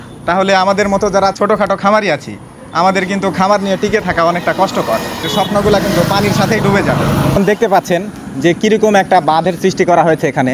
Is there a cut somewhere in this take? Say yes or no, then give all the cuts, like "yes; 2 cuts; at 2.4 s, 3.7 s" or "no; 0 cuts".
yes; 2 cuts; at 5.2 s, 7.4 s